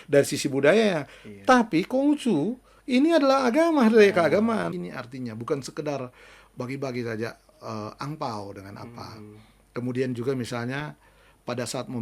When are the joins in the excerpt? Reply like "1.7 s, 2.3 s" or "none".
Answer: 4.7 s

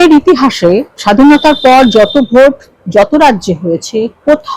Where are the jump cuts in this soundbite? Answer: 0.9 s

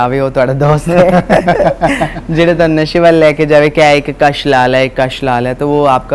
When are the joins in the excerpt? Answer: none

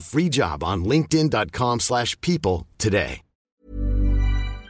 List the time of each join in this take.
3.4 s

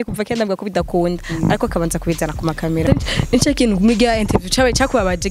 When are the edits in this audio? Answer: 2.8 s

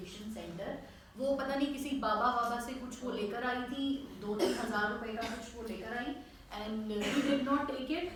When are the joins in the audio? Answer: none

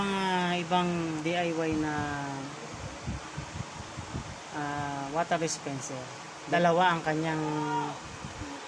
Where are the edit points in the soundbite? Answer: 1.2 s, 6.4 s

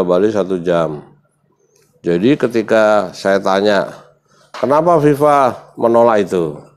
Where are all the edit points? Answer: none

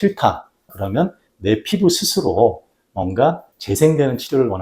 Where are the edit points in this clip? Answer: 3.5 s

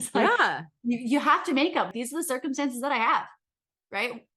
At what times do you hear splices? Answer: 1.9 s

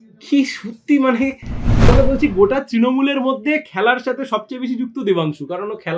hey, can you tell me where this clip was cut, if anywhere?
1.9 s

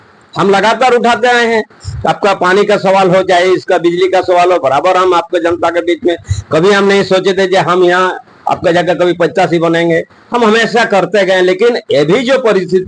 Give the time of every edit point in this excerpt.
none

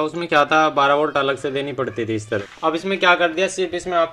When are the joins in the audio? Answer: 2.4 s

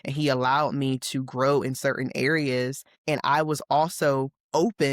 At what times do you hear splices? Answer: 2.9 s

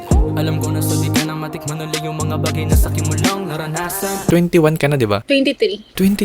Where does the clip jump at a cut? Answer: 4.3 s

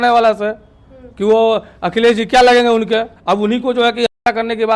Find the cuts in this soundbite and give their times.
3.1 s

